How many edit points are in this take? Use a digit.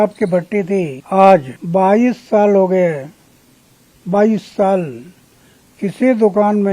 2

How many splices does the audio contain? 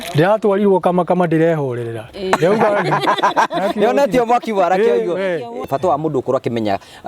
1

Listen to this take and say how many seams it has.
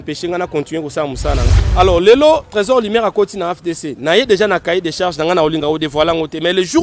1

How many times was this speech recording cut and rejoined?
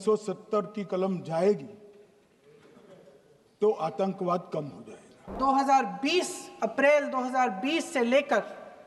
1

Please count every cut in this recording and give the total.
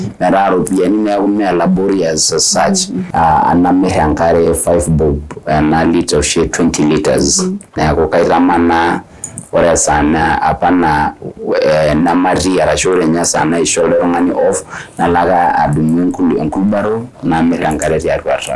1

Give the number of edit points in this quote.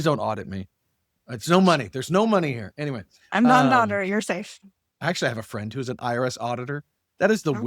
1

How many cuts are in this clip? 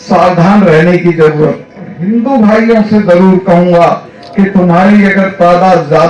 1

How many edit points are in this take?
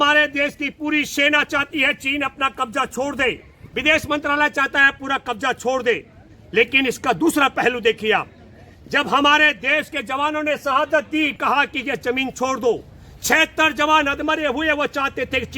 1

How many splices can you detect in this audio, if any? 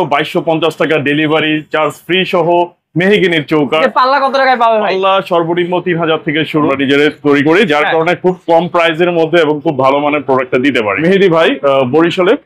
3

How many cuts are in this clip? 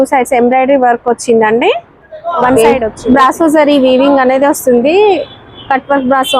1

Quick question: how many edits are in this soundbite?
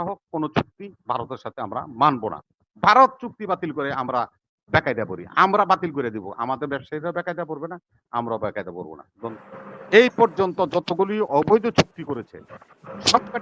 1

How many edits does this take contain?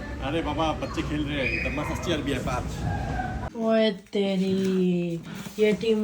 1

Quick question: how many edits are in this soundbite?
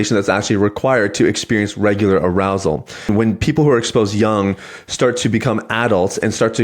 1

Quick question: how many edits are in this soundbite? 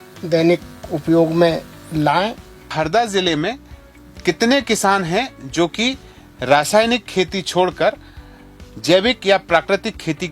1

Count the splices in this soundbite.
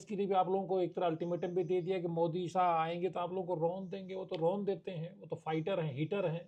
0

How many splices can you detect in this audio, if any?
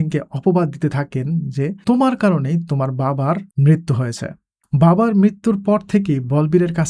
2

